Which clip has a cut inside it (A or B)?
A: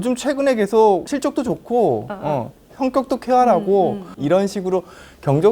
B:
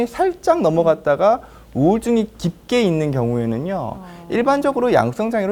A